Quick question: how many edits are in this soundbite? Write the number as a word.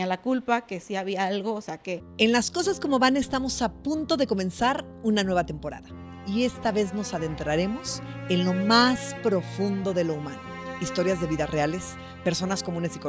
one